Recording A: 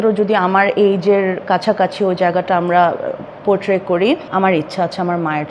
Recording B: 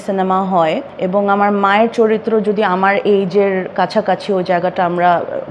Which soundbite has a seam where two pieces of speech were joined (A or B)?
A